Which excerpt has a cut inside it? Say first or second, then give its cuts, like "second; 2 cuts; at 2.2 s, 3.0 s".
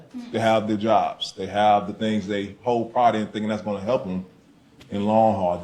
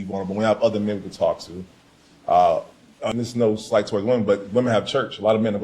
second; 1 cut; at 3.1 s